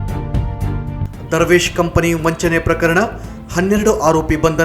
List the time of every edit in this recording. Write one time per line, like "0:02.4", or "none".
0:01.0